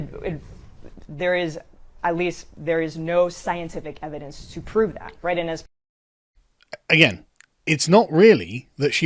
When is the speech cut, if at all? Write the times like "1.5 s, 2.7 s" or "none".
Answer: none